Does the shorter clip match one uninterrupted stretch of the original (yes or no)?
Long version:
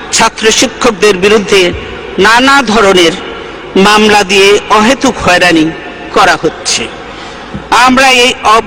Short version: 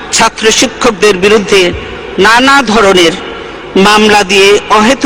yes